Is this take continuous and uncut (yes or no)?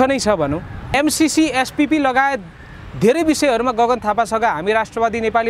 no